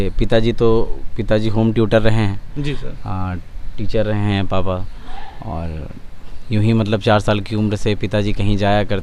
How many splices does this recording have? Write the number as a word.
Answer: zero